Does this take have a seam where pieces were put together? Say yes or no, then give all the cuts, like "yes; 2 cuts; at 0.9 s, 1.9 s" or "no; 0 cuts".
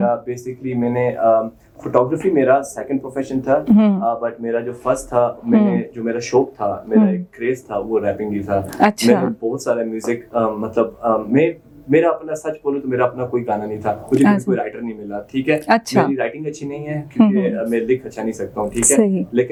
no; 0 cuts